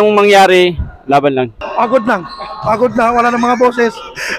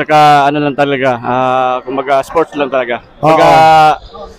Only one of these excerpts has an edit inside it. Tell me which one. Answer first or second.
first